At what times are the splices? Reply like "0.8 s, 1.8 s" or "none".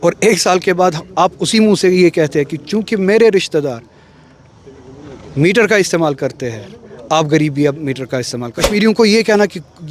8.6 s